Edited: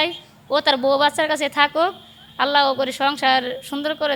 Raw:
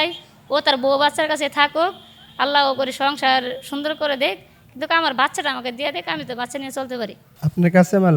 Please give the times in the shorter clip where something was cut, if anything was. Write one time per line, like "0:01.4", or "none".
none